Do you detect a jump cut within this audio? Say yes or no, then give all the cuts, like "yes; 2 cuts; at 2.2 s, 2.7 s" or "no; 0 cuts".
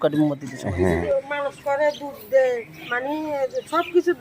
yes; 1 cut; at 1.0 s